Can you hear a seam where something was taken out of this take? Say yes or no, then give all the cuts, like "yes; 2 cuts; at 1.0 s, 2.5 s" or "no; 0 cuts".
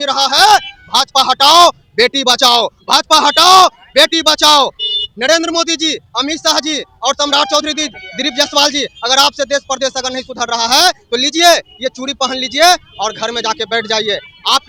no; 0 cuts